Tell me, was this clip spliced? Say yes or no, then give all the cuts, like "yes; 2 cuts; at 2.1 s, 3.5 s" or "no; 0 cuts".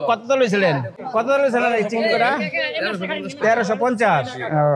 yes; 1 cut; at 1.0 s